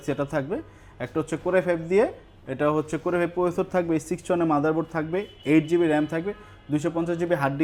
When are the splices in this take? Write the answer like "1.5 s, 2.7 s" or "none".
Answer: none